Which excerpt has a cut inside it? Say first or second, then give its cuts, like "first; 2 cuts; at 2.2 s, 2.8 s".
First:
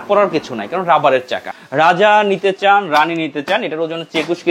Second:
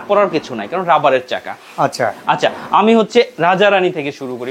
first; 1 cut; at 1.5 s